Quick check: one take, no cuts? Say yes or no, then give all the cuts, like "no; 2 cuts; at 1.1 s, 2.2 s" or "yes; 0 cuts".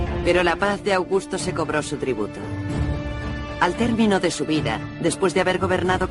no; 1 cut; at 2.2 s